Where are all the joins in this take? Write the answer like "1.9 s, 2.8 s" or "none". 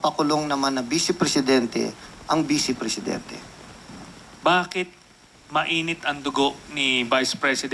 3.0 s